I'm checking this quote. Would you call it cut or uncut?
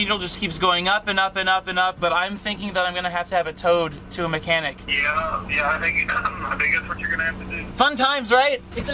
cut